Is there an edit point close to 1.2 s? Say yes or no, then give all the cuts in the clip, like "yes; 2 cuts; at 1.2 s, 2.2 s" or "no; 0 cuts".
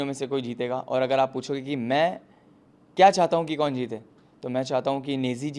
no; 0 cuts